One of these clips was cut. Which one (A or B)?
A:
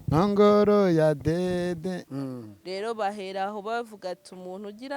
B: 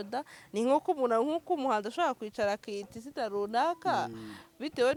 A